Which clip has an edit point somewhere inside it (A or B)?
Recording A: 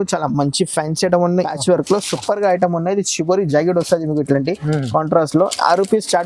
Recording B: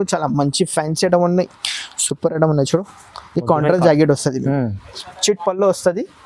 A